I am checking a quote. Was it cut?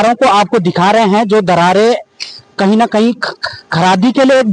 no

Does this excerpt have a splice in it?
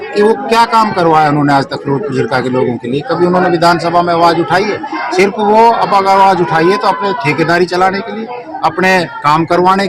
no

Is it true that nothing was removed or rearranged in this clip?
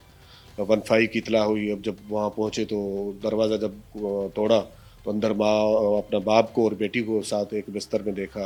yes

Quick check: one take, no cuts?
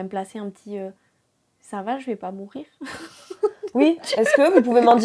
yes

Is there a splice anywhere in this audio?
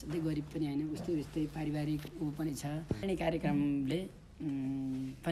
yes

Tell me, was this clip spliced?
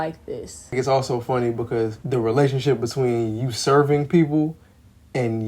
yes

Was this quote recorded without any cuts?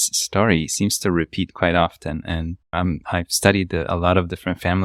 yes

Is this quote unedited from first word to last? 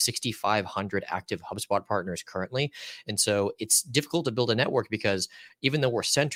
yes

